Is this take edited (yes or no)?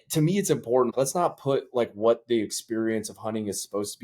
yes